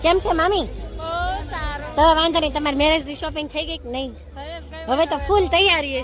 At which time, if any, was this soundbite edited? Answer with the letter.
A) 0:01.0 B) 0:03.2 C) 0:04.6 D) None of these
D